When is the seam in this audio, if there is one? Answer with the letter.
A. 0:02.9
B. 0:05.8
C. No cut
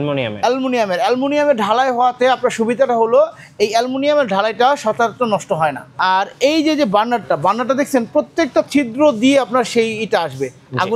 B